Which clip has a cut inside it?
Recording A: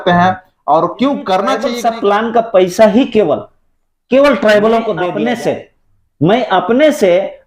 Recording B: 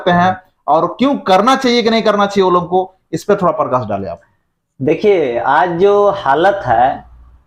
A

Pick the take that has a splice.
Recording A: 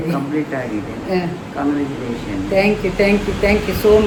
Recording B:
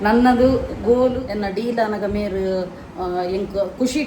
B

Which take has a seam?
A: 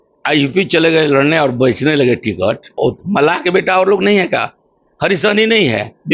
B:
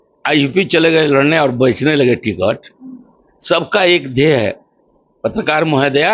A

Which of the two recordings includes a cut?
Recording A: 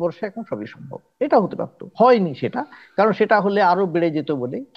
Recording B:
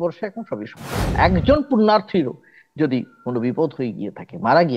B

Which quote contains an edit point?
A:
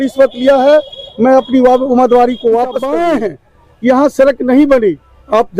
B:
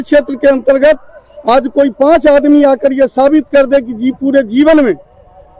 A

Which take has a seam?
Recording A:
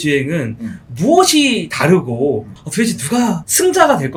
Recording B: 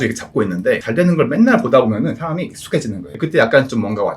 B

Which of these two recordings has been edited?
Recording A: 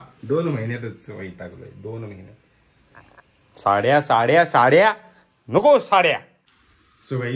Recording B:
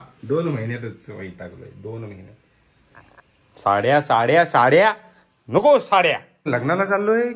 B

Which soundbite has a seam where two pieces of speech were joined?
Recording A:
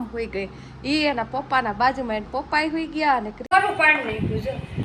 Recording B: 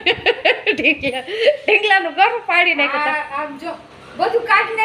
A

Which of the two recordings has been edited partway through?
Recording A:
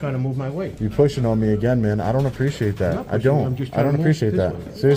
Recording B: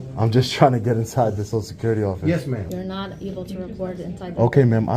B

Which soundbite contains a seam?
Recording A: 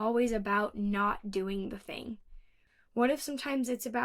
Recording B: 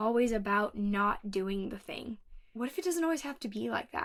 A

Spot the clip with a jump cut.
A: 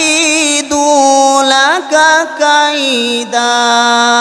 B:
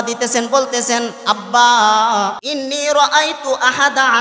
B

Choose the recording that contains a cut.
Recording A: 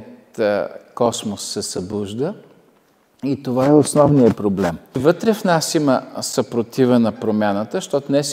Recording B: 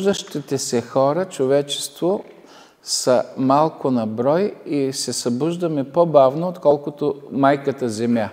A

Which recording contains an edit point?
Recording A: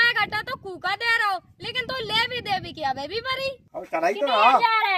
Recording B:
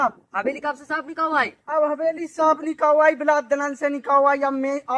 A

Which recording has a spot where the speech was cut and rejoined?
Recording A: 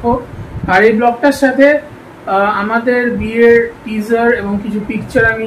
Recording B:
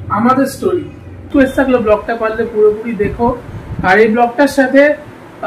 B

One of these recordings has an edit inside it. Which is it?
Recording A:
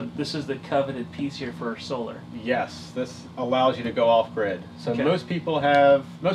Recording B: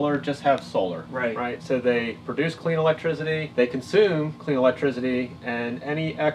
B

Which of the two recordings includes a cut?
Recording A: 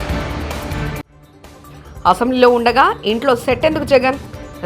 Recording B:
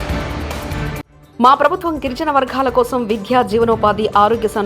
B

